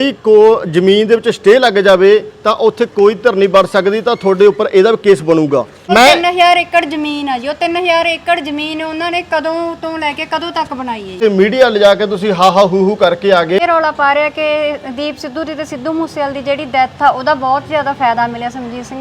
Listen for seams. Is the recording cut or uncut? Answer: cut